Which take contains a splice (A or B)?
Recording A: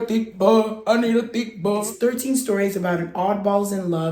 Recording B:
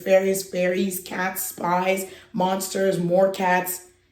A